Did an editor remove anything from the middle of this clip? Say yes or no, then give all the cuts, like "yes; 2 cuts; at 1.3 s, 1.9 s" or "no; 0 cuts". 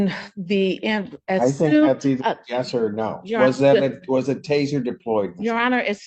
no; 0 cuts